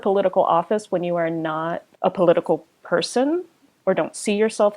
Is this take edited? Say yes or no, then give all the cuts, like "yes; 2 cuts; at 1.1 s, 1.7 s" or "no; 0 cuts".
yes; 1 cut; at 1.9 s